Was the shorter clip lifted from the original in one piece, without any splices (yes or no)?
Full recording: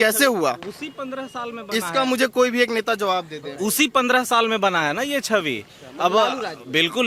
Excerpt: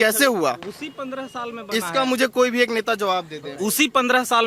yes